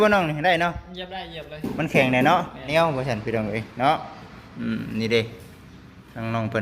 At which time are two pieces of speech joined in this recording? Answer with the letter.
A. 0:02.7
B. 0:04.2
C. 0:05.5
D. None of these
A